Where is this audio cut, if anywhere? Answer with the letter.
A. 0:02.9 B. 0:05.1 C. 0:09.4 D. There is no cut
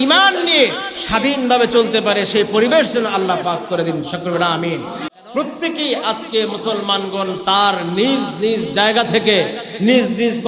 B